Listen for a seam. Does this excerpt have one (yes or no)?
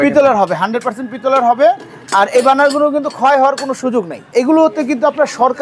yes